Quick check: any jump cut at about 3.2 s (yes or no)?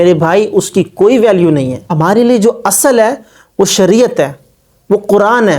no